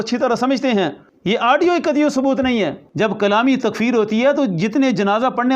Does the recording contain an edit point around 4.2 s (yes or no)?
no